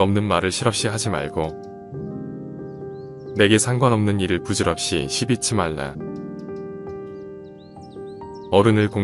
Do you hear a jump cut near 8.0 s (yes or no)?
yes